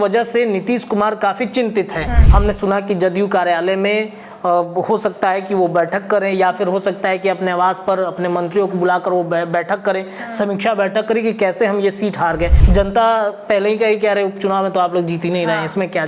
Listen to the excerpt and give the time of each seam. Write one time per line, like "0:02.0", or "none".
0:02.2
0:12.6